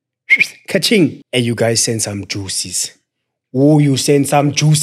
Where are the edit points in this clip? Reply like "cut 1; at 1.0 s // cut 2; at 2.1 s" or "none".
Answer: cut 1; at 1.2 s